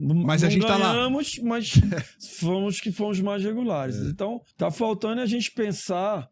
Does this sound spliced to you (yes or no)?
yes